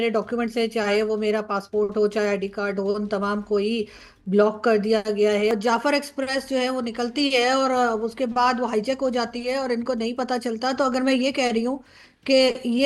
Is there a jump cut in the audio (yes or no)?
yes